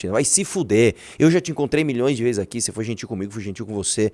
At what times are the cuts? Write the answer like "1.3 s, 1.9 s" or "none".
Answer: none